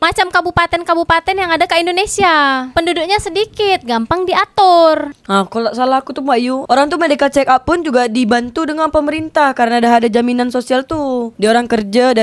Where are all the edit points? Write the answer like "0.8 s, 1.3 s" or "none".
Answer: 5.0 s